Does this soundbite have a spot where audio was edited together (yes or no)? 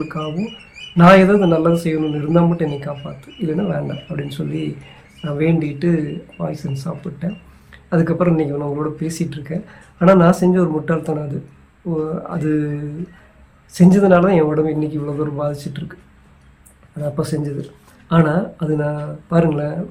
no